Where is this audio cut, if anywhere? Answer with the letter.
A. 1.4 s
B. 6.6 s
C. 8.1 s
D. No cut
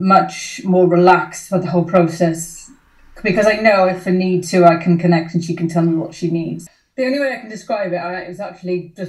B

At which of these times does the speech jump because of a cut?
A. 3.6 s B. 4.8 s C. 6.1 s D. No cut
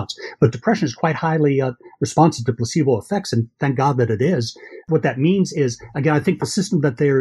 B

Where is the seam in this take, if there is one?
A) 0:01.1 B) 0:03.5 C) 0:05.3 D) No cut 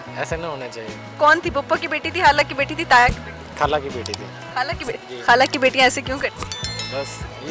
A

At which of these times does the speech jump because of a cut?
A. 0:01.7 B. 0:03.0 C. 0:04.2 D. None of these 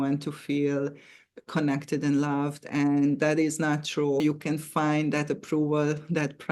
C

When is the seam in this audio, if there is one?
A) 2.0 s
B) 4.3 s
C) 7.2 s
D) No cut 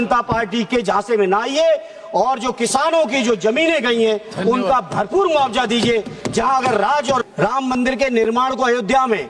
C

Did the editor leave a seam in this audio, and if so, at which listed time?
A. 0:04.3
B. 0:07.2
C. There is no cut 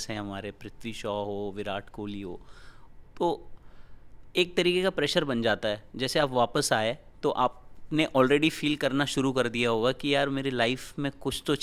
C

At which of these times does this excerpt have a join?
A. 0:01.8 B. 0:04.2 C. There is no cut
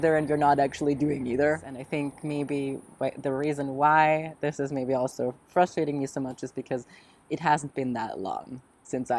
A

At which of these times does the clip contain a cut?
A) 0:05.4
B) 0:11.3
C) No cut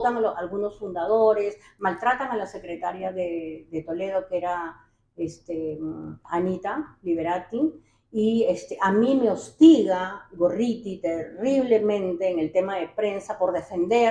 C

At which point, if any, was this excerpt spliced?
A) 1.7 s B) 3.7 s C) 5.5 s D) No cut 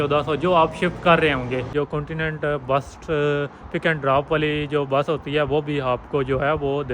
A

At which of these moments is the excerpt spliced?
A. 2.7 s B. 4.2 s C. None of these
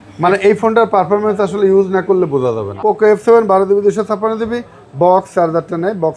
A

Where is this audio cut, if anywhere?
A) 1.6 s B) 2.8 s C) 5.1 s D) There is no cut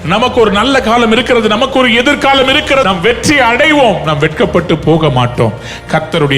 B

